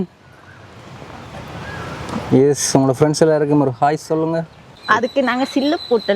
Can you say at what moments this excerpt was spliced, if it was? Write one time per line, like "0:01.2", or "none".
0:04.8